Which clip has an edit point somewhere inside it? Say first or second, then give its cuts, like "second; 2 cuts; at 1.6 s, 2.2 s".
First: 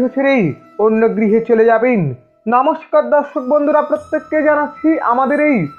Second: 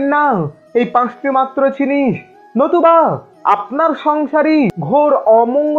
second; 1 cut; at 4.8 s